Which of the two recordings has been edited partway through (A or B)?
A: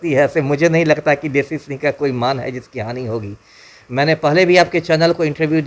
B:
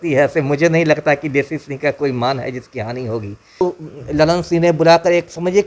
B